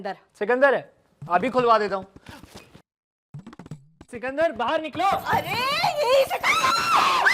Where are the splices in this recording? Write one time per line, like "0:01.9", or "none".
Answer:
none